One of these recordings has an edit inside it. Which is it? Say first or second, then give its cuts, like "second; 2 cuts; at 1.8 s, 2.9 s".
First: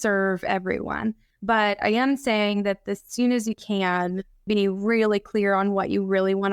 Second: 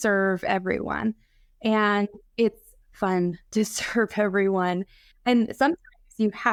first; 2 cuts; at 1.3 s, 4.4 s